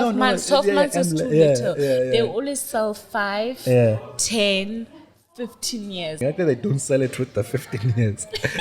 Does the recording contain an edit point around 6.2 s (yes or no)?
yes